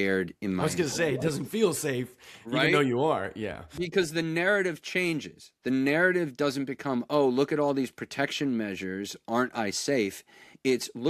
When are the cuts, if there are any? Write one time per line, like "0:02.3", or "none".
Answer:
none